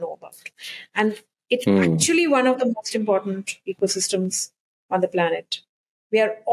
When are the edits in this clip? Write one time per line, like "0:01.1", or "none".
none